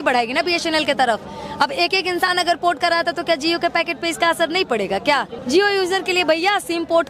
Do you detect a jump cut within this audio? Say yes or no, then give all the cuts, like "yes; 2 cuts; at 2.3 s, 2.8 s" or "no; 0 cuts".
yes; 1 cut; at 5.4 s